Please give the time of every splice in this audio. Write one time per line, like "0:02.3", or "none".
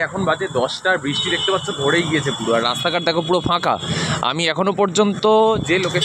none